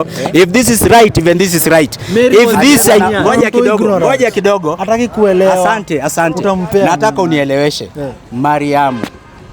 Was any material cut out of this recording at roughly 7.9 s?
no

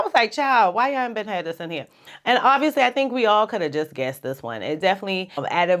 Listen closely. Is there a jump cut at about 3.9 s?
no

